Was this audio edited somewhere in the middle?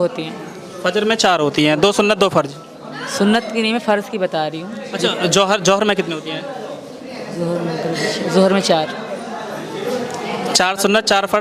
no; 0 cuts

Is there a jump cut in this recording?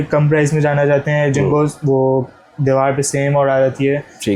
no; 0 cuts

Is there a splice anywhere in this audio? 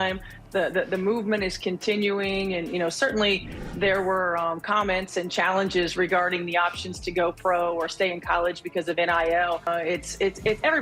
no; 0 cuts

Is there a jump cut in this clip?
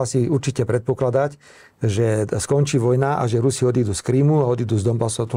no; 0 cuts

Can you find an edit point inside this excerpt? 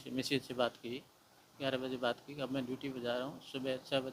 no; 0 cuts

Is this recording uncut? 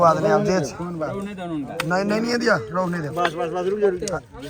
yes; 0 cuts

